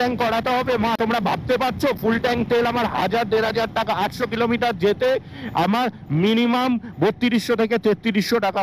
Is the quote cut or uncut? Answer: cut